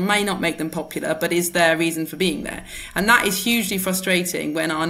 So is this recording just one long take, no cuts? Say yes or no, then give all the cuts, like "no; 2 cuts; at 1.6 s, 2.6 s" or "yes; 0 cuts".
yes; 0 cuts